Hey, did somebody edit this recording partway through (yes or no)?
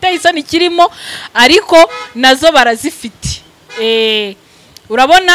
no